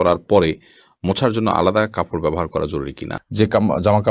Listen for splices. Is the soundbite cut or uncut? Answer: cut